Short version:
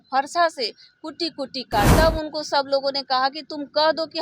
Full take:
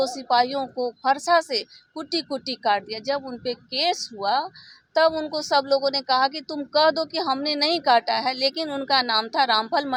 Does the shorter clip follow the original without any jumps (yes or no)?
no